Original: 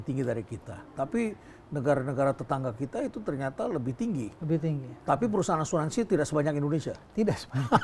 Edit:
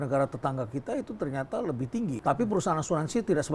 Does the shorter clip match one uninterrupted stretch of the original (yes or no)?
no